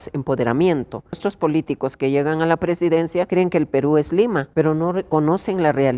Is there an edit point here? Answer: yes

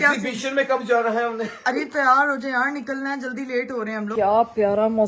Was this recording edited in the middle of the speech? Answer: yes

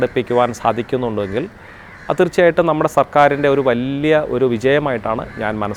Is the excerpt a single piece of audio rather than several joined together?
yes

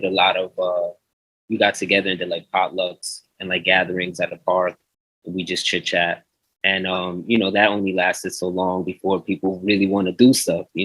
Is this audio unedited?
yes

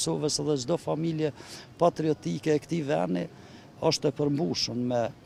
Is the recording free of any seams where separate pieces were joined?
yes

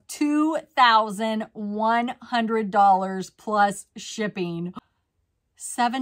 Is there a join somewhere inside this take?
yes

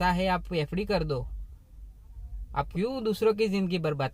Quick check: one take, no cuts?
no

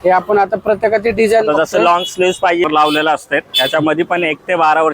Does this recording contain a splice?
yes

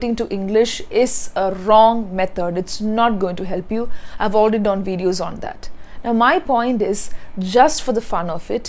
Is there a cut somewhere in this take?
no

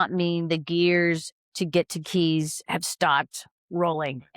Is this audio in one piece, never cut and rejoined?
yes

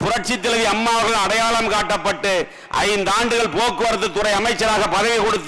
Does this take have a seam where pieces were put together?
no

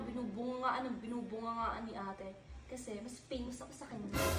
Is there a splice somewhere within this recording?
no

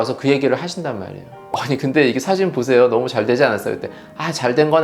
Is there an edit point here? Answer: yes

